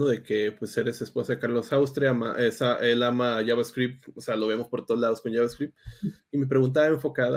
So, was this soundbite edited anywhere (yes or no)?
no